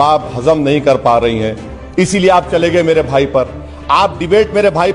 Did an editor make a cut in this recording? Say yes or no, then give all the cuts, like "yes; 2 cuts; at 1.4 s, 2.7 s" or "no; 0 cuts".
no; 0 cuts